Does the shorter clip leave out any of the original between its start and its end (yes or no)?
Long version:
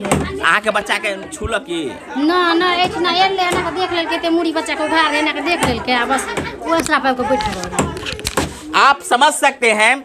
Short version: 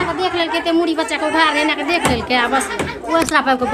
no